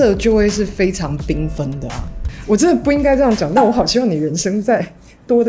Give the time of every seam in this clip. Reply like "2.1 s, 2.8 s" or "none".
2.4 s